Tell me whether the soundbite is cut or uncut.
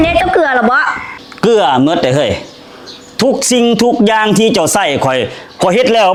uncut